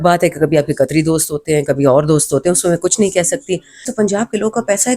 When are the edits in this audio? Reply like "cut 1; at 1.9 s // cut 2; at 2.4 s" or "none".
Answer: cut 1; at 3.8 s